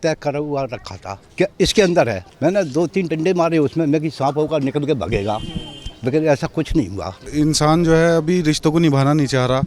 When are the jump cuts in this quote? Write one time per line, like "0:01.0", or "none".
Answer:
0:07.2

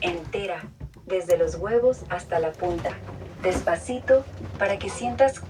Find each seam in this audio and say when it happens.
none

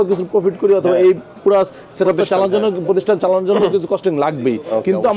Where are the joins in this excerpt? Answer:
none

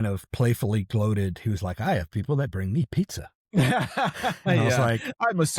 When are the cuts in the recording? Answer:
none

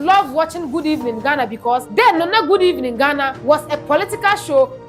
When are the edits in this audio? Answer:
0:01.9
0:03.3

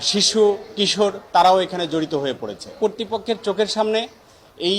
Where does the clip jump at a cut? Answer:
0:02.8

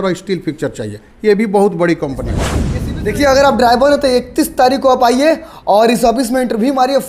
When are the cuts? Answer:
0:02.5

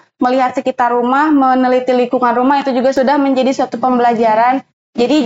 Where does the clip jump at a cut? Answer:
0:02.9

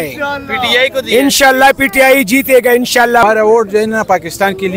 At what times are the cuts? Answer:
0:03.2

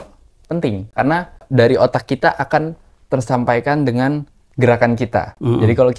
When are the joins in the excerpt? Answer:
0:01.4

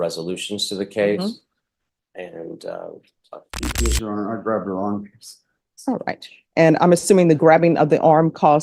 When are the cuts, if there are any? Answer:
0:03.6

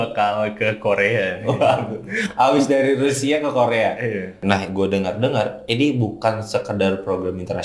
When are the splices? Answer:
0:04.4

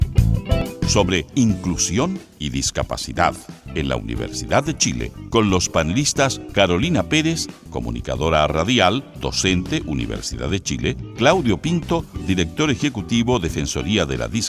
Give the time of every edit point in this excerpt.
0:00.9

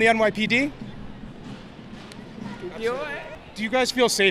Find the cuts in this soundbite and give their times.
0:03.3

